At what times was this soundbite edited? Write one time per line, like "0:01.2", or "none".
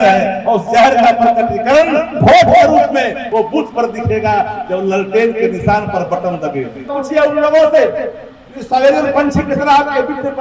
0:03.2
0:07.0